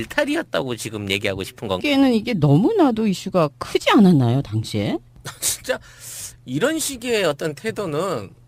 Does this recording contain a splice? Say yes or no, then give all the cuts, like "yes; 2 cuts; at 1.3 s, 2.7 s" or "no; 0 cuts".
no; 0 cuts